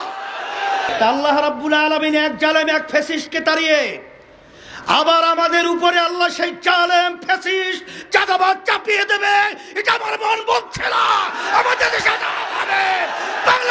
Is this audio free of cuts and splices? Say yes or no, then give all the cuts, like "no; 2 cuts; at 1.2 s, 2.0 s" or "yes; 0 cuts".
no; 1 cut; at 0.9 s